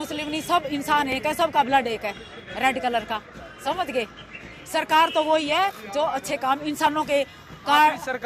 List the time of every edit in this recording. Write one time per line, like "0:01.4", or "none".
0:04.6